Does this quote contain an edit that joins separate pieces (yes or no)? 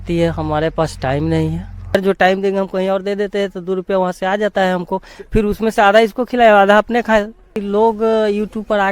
yes